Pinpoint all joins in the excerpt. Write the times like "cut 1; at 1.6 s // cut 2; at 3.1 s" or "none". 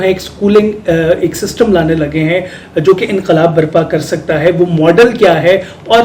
none